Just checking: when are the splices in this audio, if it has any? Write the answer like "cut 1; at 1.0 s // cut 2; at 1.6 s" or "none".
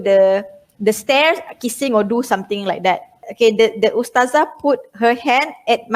cut 1; at 3.2 s